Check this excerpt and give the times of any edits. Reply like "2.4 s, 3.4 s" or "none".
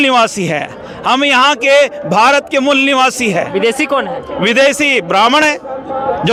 none